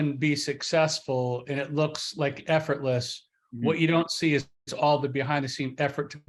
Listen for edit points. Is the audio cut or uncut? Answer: uncut